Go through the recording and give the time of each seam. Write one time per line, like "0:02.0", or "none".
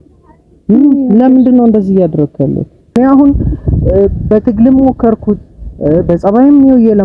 0:03.0

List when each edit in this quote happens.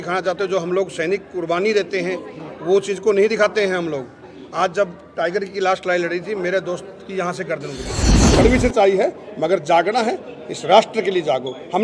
0:08.1

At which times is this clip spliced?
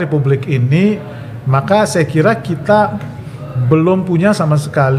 none

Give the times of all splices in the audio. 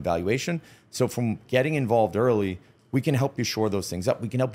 none

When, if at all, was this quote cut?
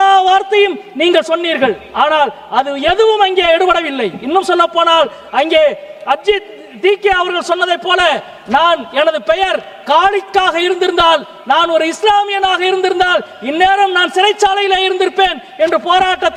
none

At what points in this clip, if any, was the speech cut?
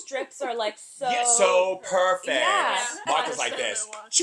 0:03.0

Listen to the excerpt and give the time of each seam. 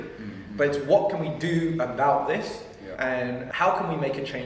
0:02.9

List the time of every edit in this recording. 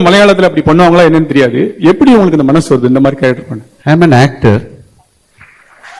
none

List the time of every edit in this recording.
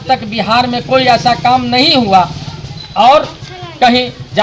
none

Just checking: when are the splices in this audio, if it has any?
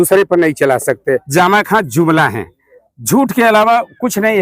0:01.2

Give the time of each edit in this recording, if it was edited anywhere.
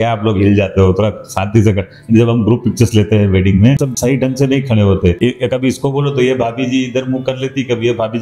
0:03.9
0:05.2

